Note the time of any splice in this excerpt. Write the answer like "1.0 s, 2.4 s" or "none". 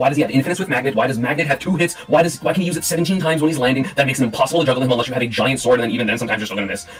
none